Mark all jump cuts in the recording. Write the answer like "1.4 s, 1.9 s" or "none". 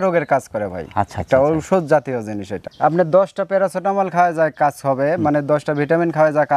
2.7 s

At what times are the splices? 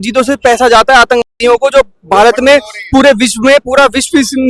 none

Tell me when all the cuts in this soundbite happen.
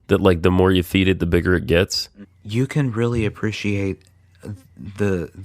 2.0 s

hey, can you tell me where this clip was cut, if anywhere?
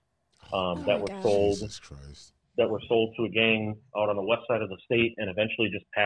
none

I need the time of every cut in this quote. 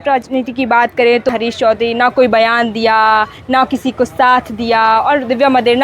1.3 s

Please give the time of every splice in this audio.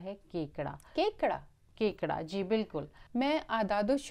3.0 s

